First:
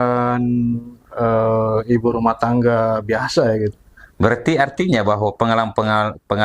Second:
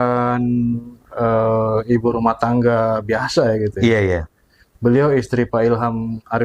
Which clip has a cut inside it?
first; 1 cut; at 3.7 s

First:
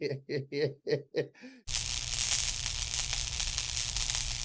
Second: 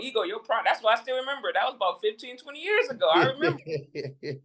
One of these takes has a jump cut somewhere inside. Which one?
first; 1 cut; at 1.6 s

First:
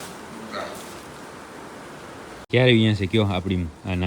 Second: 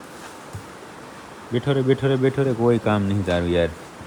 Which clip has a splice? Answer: first; 1 cut; at 2.4 s

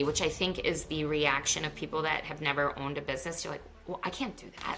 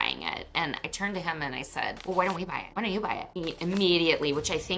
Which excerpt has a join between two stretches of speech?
second; 3 cuts; at 2.0 s, 2.6 s, 3.3 s

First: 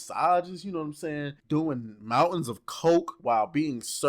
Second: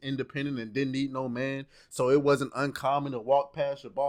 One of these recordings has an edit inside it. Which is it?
first; 2 cuts; at 1.3 s, 3.1 s

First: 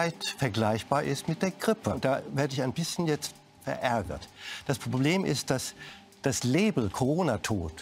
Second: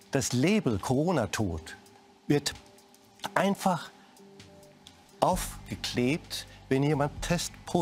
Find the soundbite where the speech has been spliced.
first; 1 cut; at 2.0 s

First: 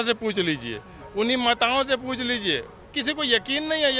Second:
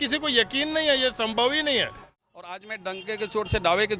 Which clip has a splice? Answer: second; 1 cut; at 2.0 s

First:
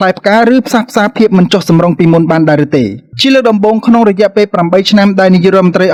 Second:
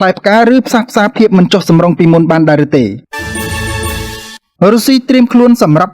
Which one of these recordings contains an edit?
second; 1 cut; at 3.1 s

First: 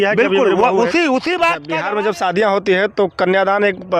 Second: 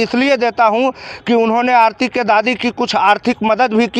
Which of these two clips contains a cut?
first; 1 cut; at 1.7 s

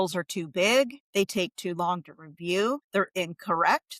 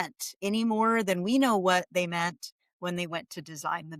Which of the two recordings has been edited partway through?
first; 2 cuts; at 1.0 s, 2.8 s

